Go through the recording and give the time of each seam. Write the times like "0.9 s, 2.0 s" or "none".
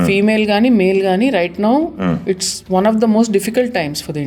none